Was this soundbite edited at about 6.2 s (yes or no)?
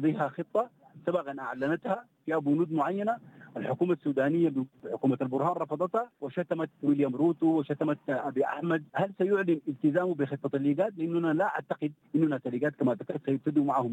yes